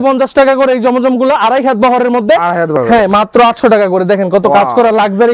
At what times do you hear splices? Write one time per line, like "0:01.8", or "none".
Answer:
0:02.7